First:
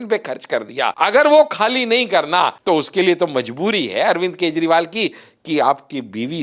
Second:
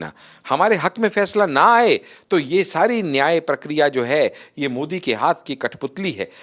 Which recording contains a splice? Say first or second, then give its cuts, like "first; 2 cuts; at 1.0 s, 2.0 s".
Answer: first; 2 cuts; at 0.9 s, 2.6 s